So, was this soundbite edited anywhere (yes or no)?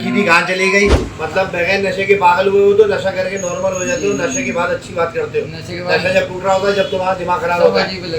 yes